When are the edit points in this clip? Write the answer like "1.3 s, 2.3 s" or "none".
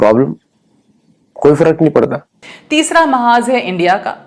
2.6 s